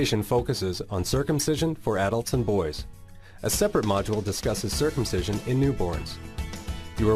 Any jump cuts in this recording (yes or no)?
no